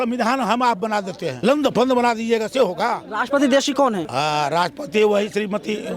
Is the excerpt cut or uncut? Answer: cut